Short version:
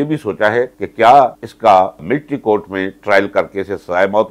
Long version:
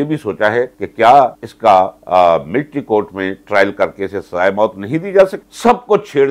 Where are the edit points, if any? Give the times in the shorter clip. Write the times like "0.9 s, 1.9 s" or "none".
2.0 s